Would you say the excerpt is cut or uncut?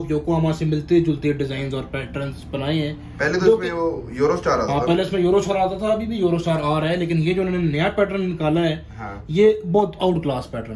uncut